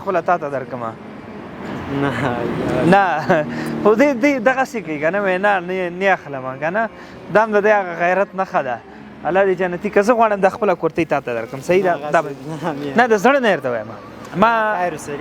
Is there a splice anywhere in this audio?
no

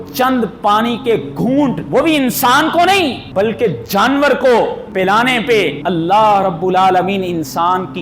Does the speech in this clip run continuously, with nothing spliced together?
no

